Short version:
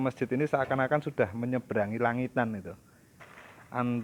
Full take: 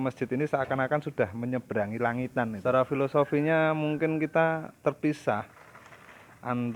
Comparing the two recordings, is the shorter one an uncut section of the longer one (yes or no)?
no